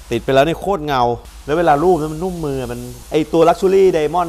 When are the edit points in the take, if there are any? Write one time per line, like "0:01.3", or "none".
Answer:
0:01.3